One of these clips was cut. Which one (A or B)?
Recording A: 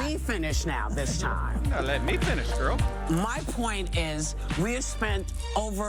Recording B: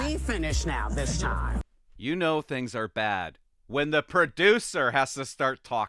B